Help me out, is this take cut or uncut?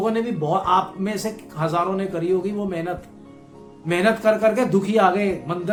uncut